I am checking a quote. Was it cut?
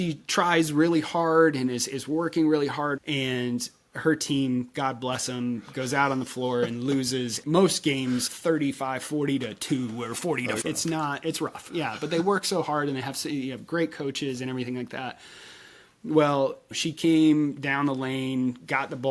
yes; 2 cuts; at 3.0 s, 7.4 s

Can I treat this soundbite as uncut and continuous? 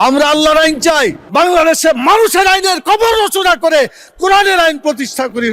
no; 1 cut; at 1.2 s

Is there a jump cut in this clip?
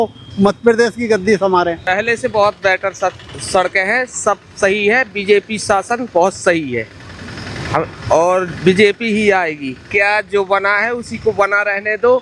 yes; 2 cuts; at 1.8 s, 9.8 s

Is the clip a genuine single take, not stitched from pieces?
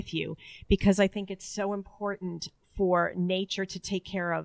no; 1 cut; at 2.5 s

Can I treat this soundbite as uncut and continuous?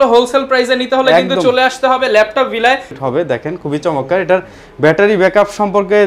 no; 1 cut; at 2.9 s

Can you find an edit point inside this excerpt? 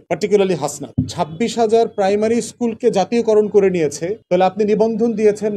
yes; 1 cut; at 0.9 s

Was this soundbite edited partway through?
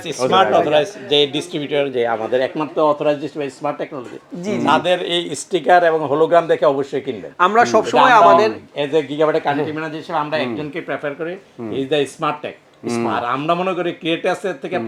no; 0 cuts

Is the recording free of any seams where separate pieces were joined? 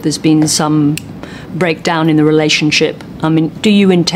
yes; 0 cuts

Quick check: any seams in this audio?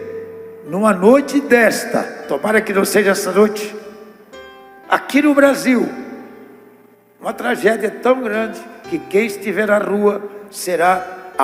no; 0 cuts

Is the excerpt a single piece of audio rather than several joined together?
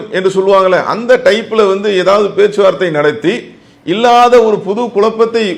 yes; 0 cuts

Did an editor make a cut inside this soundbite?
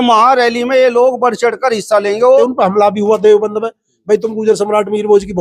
yes; 1 cut; at 2.4 s

